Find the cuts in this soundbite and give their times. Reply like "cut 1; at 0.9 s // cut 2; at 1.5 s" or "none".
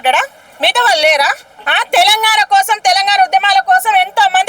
cut 1; at 1.5 s

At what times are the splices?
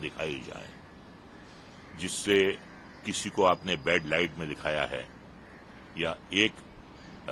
none

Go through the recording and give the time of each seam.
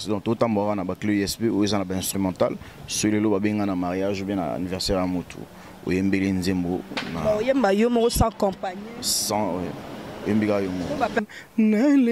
cut 1; at 11.2 s

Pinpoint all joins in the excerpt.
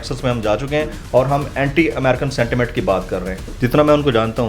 cut 1; at 3.4 s

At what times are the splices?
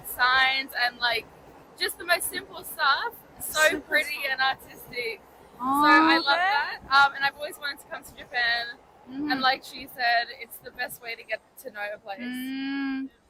none

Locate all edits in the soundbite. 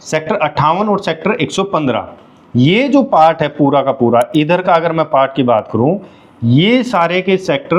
none

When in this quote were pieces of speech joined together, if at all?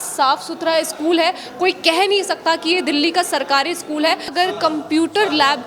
cut 1; at 4.3 s

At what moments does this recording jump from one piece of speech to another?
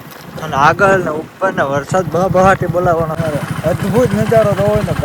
cut 1; at 3.1 s

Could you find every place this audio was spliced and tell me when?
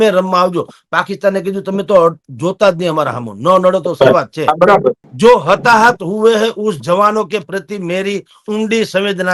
cut 1; at 5.1 s

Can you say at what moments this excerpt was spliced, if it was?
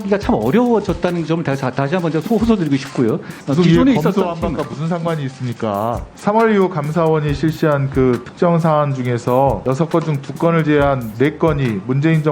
cut 1; at 3.4 s // cut 2; at 6.0 s // cut 3; at 9.6 s

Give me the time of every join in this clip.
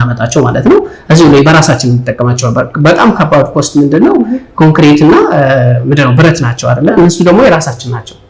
none

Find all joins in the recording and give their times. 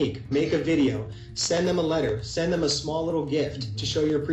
none

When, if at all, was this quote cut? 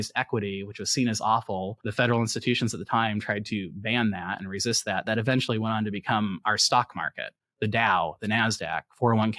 cut 1; at 1.8 s

